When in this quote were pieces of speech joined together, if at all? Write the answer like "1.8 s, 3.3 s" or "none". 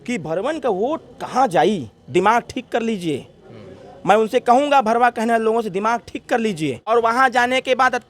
6.9 s